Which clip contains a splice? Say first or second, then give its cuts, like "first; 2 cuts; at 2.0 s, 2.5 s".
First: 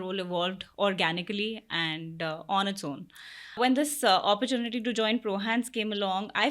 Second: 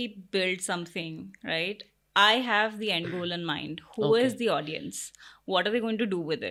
first; 1 cut; at 3.6 s